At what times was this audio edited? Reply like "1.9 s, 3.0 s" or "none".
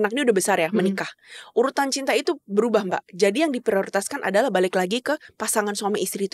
none